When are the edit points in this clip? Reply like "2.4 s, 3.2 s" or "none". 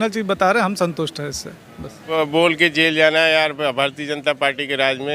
2.1 s